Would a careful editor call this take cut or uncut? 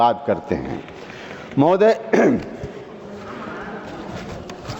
uncut